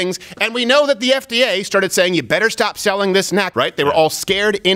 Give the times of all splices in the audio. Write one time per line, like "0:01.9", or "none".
0:03.5

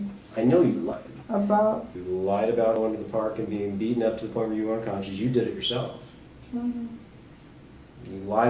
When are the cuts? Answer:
0:01.9

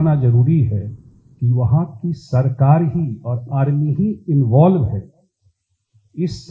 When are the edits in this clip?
none

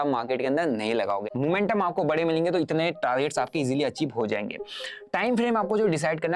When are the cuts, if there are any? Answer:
0:01.3

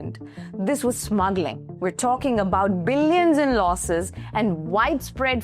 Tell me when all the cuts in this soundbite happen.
0:01.7

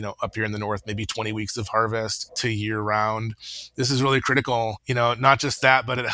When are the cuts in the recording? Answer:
0:02.2
0:04.8

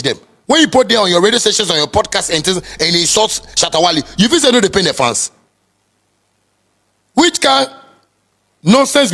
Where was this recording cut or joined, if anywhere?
none

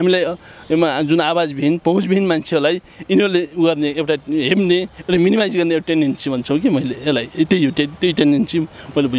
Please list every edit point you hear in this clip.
none

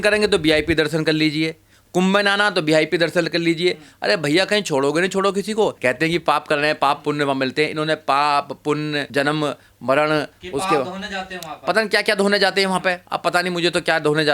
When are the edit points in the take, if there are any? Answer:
0:05.8

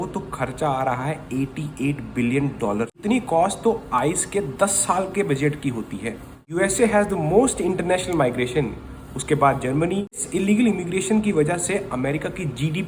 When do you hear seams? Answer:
0:03.0
0:06.4
0:10.2

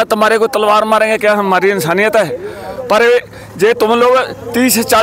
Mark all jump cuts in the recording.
none

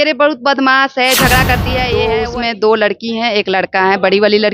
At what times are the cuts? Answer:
0:01.9

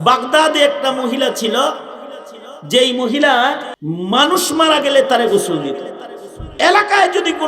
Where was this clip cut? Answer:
0:03.7

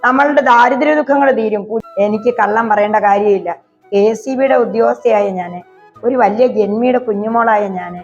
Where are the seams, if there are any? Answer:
0:01.7

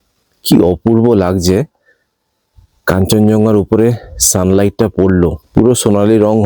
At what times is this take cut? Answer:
0:05.4

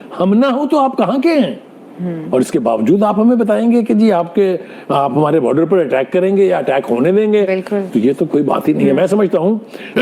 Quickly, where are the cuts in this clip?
0:01.0

